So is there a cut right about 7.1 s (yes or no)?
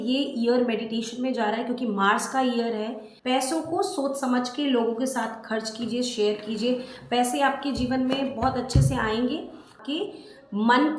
no